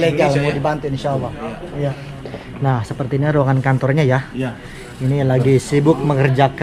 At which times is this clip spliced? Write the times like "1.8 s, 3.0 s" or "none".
2.0 s